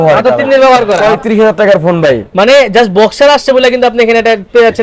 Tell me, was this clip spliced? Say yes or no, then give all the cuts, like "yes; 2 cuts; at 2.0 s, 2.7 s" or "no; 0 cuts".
yes; 1 cut; at 1.1 s